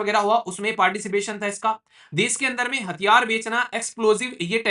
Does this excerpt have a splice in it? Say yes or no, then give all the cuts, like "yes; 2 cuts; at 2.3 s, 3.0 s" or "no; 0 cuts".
no; 0 cuts